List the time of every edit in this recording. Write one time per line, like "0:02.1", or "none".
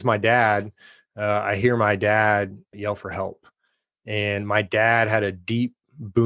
0:02.7